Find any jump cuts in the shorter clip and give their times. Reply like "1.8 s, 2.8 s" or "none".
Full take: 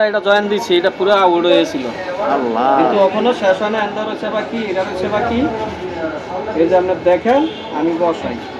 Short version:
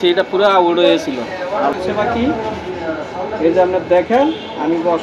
1.7 s